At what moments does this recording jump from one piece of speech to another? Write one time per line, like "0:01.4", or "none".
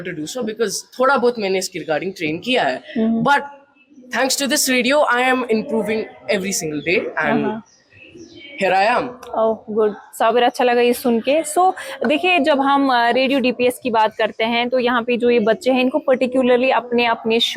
none